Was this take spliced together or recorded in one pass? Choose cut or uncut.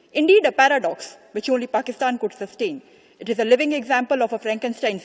uncut